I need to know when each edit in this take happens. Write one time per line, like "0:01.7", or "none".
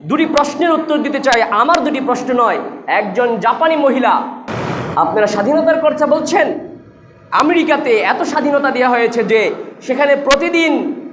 0:04.4